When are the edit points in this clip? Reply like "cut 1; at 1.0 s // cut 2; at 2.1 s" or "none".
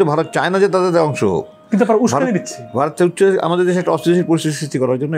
none